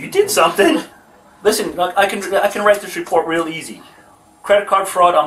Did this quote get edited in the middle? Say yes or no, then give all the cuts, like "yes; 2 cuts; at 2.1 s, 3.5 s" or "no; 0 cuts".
no; 0 cuts